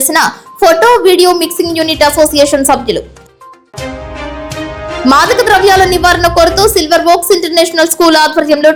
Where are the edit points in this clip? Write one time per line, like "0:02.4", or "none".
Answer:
none